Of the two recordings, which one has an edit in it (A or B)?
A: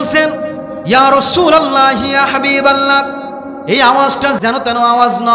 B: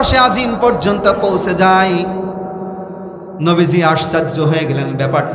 A